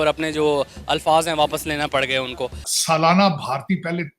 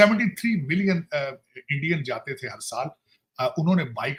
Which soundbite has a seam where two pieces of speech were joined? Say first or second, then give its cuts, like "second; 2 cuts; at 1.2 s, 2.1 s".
first; 1 cut; at 2.7 s